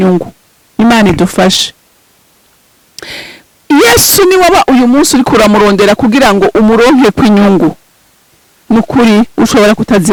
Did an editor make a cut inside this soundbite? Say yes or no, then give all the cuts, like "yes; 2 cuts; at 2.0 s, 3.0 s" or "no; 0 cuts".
no; 0 cuts